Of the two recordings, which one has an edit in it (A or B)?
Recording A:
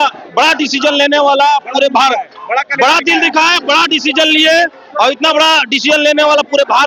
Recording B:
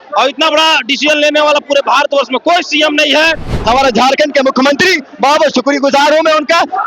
B